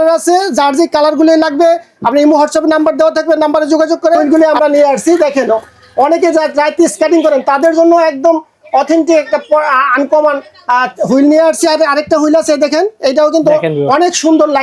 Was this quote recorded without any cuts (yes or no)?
no